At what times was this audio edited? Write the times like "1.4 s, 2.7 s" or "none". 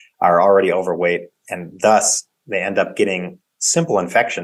none